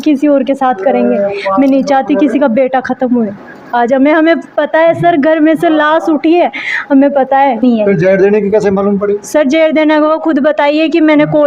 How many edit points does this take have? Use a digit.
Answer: 1